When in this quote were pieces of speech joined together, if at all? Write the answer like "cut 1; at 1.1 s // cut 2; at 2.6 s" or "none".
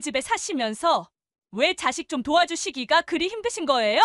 none